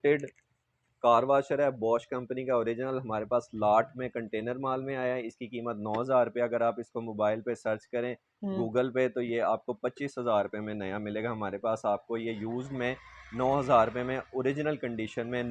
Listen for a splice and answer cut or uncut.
uncut